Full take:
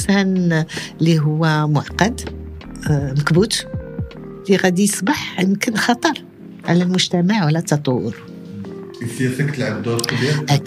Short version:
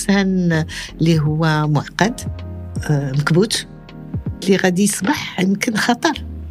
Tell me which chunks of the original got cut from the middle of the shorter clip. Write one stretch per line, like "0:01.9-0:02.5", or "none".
none

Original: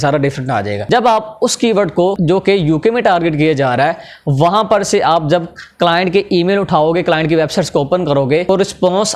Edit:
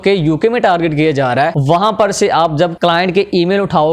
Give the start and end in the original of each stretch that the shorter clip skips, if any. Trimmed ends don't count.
0:04.0-0:04.3
0:05.5-0:05.7

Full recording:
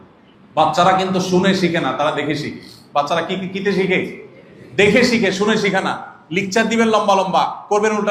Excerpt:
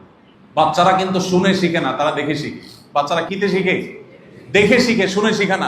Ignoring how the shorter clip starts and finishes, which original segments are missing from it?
0:03.3-0:03.5

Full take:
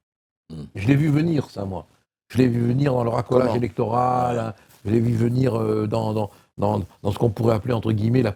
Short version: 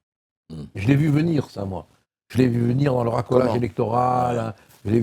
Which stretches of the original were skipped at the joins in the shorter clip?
none

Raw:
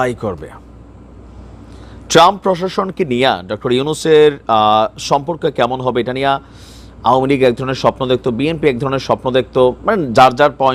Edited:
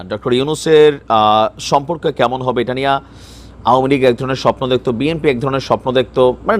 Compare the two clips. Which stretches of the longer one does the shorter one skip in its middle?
none

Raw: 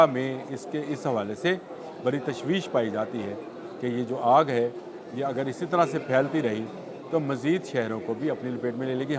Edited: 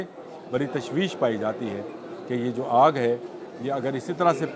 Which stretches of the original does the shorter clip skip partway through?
none

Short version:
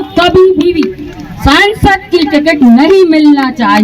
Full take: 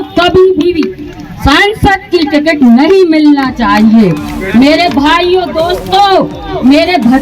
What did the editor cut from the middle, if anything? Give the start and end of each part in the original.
none

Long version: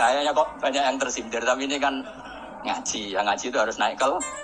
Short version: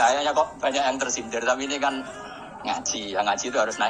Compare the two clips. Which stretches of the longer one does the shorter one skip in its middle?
none

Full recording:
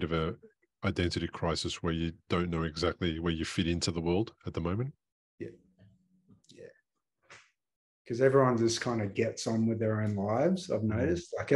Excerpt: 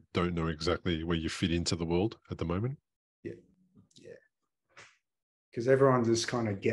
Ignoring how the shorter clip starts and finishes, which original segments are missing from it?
0:05.7-0:06.1

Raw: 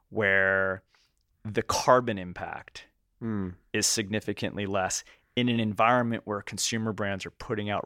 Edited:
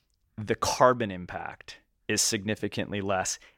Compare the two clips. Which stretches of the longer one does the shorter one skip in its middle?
0:03.0-0:03.6

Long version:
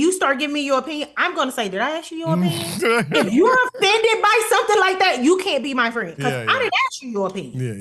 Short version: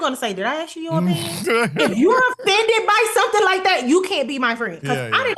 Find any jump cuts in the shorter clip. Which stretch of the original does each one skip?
none

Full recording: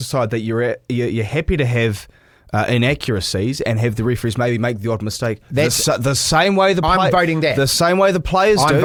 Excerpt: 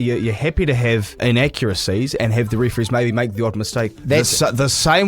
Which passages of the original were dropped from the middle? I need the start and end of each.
0:02.1-0:02.7

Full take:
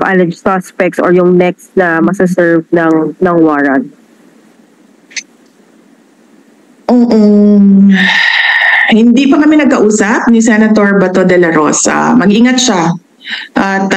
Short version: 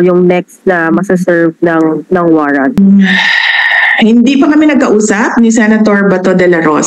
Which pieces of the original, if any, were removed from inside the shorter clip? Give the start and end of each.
0:03.9-0:07.7

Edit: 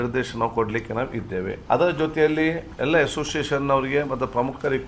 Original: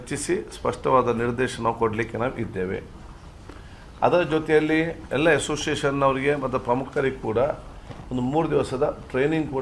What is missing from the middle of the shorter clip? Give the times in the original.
0:02.8-0:03.9

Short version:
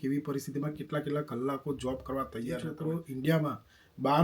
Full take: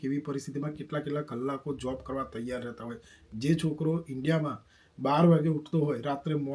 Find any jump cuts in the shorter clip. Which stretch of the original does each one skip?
0:02.7-0:03.7

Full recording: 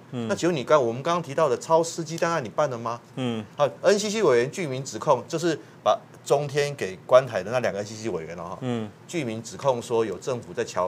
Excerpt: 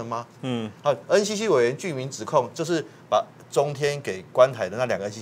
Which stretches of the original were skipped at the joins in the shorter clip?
none

